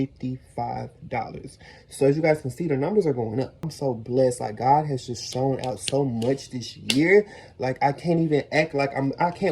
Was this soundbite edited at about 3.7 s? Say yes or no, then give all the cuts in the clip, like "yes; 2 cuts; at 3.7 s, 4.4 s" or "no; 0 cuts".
yes; 1 cut; at 3.7 s